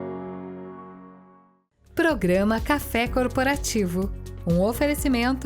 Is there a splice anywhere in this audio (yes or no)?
yes